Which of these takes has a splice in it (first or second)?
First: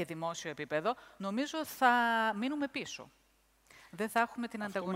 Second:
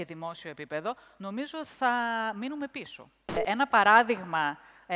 second